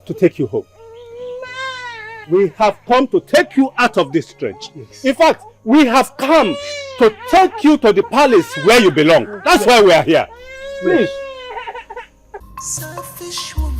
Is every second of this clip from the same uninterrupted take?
no; 1 cut; at 12.4 s

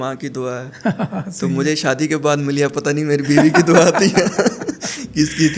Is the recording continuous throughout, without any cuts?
yes; 0 cuts

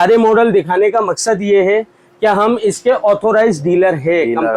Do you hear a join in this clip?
no; 0 cuts

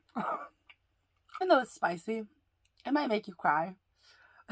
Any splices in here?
yes; 1 cut; at 1.4 s

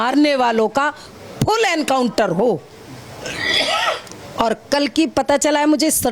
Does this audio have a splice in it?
no; 0 cuts

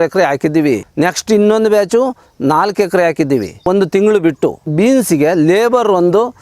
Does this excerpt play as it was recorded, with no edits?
no; 3 cuts; at 0.9 s, 3.7 s, 4.7 s

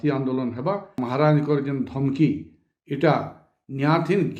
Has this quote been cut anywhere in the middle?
yes; 1 cut; at 1.0 s

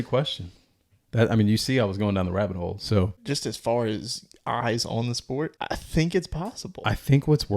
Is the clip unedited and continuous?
no; 2 cuts; at 3.2 s, 5.6 s

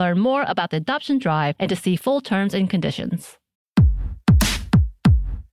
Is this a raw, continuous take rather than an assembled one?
no; 1 cut; at 3.9 s

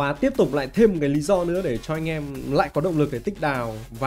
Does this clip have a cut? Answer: no; 0 cuts

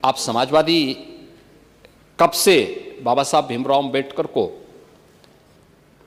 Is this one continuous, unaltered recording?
yes; 0 cuts

